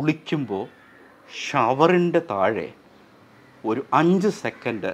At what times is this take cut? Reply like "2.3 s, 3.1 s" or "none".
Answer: none